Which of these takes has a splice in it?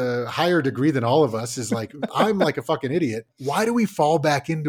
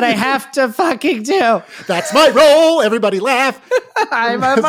first; 2 cuts; at 2.1 s, 3.3 s

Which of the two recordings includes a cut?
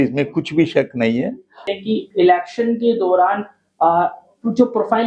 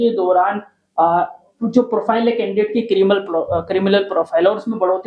first; 1 cut; at 1.6 s

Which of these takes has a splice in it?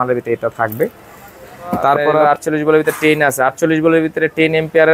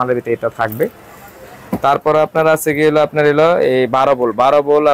first; 1 cut; at 2.2 s

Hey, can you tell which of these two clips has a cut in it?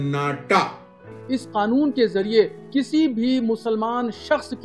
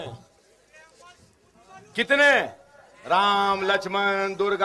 first; 1 cut; at 1.2 s

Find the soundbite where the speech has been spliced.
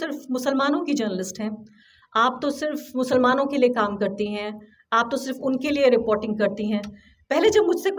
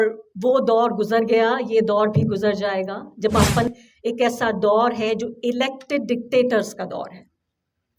second; 1 cut; at 3.7 s

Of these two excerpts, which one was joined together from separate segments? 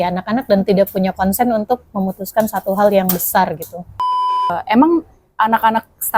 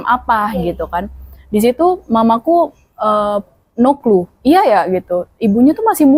first; 1 cut; at 4.1 s

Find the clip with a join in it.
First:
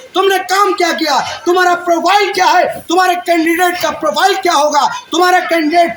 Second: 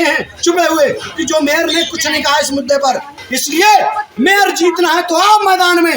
second; 1 cut; at 3.2 s

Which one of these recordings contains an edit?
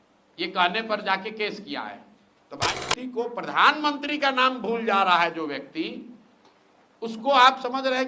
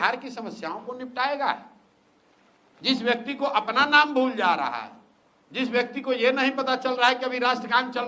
first; 1 cut; at 2.7 s

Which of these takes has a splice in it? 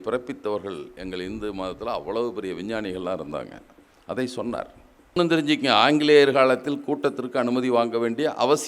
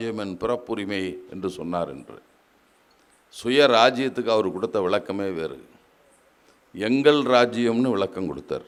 first; 1 cut; at 5.2 s

